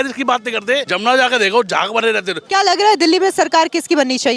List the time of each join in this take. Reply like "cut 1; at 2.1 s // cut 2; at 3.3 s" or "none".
cut 1; at 0.9 s // cut 2; at 2.4 s